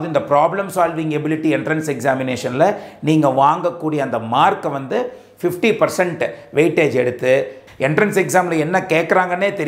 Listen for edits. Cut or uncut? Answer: cut